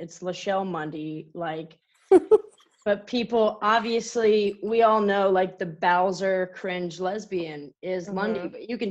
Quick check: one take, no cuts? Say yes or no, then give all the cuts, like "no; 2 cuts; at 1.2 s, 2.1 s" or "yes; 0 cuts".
yes; 0 cuts